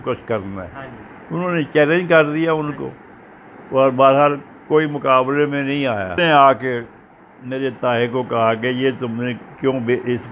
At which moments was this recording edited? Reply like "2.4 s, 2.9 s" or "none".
6.2 s